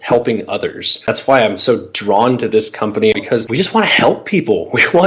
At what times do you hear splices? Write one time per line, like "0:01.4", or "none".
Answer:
0:01.1
0:03.2